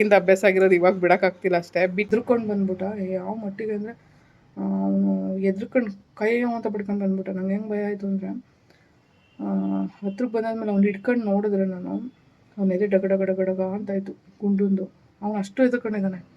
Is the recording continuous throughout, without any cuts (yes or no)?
no